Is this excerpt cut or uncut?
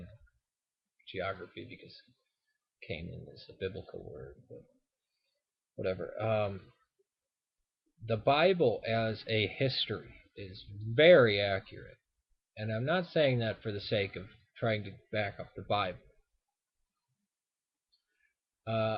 uncut